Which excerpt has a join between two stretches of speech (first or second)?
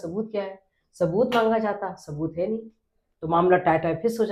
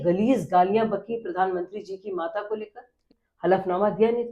second